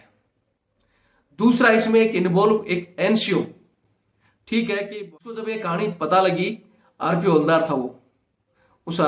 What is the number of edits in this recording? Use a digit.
1